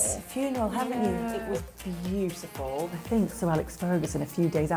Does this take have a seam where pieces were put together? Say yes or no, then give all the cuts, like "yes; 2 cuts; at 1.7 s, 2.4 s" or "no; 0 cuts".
yes; 2 cuts; at 1.4 s, 3.0 s